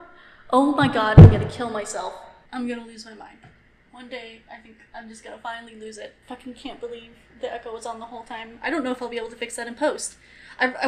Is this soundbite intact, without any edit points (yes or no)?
no